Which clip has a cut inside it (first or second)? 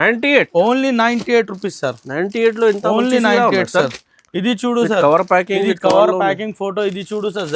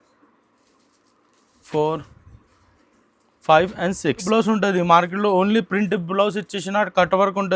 second